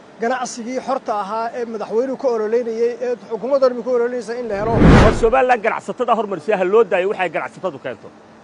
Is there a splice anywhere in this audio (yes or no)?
yes